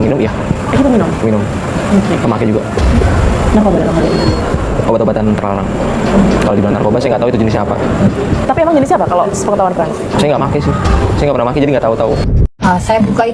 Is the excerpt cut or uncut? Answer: uncut